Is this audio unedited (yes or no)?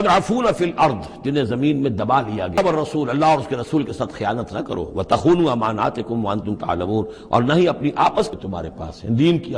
no